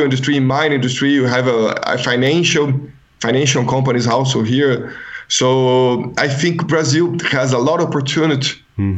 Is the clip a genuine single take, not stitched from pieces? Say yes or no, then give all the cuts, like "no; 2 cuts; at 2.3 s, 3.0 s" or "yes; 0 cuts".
yes; 0 cuts